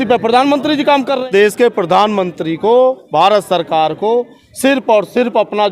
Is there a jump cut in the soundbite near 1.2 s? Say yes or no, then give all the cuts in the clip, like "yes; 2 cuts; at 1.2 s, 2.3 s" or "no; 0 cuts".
yes; 1 cut; at 1.2 s